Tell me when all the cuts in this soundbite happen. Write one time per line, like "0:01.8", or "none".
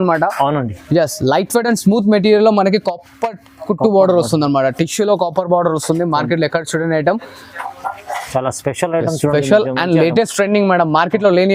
none